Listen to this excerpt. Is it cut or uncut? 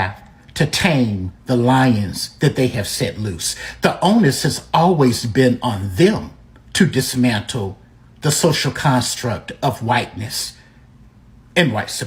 uncut